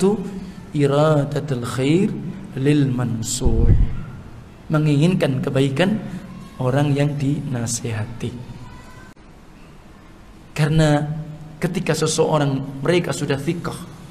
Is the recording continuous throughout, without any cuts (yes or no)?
no